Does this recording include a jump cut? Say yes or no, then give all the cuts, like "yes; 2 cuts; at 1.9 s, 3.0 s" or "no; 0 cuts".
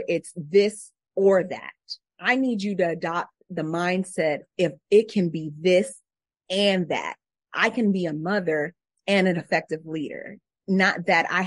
no; 0 cuts